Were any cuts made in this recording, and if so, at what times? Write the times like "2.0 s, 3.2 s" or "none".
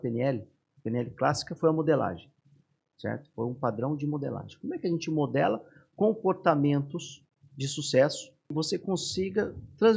8.5 s